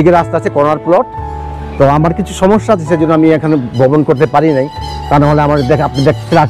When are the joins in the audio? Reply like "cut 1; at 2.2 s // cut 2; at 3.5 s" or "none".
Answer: none